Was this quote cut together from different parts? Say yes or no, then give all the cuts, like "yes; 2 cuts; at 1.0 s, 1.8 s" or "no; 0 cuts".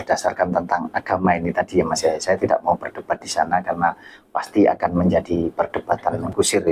no; 0 cuts